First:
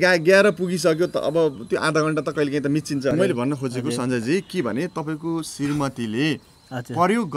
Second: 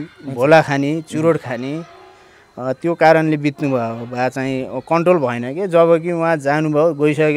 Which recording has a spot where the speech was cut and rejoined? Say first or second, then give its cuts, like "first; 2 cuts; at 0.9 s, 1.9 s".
first; 1 cut; at 3.1 s